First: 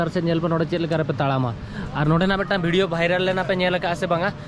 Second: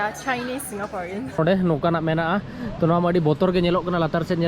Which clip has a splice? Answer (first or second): second